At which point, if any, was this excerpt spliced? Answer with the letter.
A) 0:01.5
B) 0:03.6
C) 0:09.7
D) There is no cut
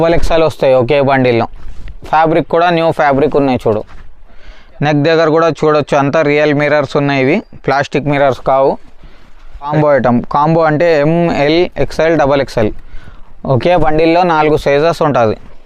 C